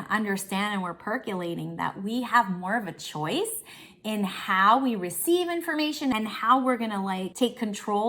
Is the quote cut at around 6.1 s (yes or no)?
yes